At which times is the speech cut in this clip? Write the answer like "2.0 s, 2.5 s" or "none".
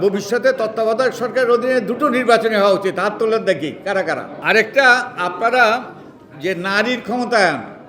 4.3 s